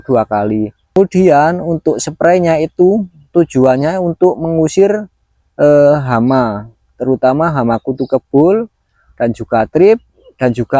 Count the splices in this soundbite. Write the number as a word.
one